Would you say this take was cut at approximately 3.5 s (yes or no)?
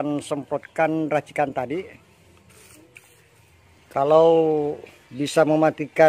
yes